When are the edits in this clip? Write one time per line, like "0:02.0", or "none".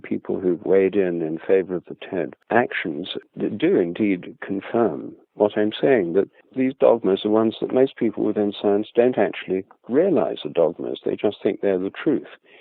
0:02.4
0:03.2
0:06.4